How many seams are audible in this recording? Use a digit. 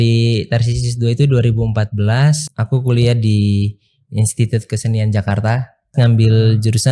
2